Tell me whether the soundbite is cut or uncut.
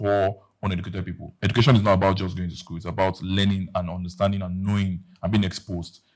uncut